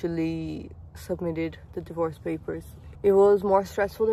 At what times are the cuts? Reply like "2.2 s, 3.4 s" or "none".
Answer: none